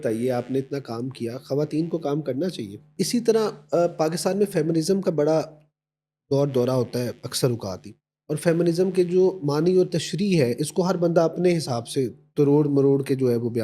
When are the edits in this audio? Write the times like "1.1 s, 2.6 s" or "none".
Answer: 2.9 s